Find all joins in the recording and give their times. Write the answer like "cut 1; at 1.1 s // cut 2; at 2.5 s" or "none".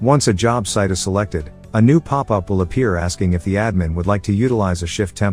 none